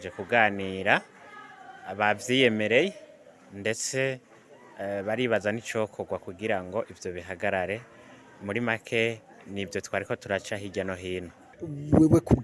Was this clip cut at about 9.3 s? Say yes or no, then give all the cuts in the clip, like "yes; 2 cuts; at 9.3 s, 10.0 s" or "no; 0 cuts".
no; 1 cut; at 11.5 s